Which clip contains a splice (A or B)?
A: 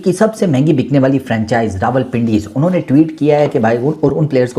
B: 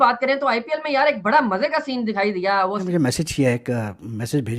B